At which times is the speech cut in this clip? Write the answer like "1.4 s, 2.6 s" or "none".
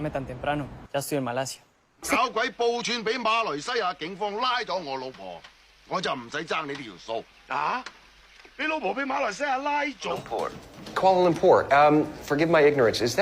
2.2 s, 10.1 s